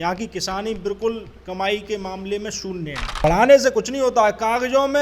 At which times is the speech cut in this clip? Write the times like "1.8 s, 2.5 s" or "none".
3.0 s